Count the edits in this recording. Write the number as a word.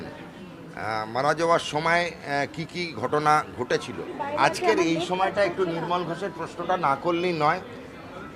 one